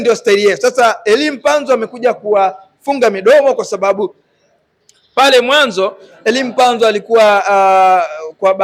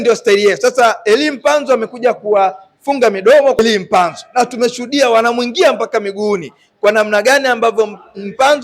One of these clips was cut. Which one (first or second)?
second